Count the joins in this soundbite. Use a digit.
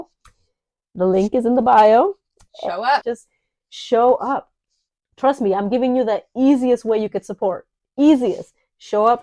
1